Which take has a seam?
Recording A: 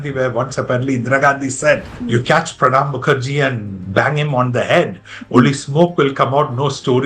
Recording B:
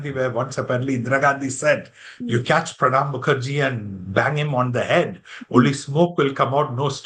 A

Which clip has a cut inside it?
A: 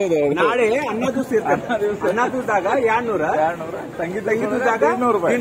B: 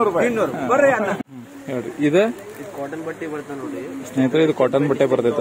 B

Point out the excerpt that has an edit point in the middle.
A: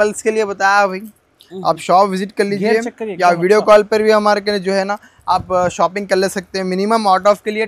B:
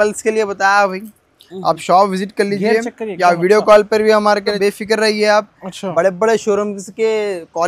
B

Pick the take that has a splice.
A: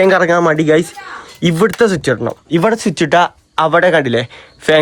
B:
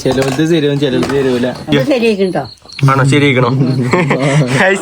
B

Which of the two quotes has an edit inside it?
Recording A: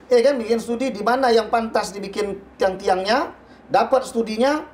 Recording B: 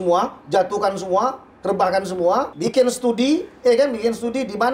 B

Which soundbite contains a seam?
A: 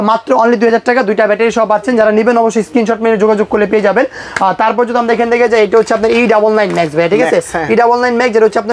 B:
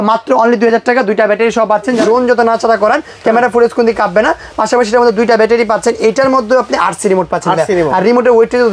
B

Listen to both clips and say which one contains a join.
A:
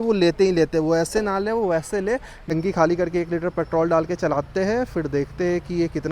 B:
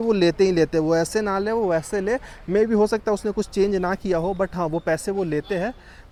A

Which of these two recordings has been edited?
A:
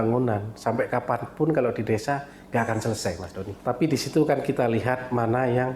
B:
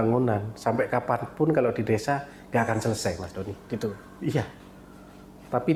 A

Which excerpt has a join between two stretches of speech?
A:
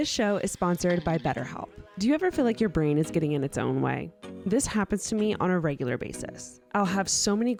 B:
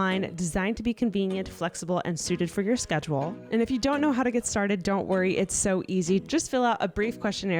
B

